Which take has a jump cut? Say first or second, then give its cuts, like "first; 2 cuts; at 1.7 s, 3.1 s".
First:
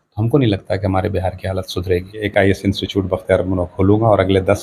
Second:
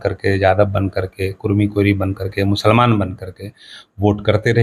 first; 1 cut; at 2.2 s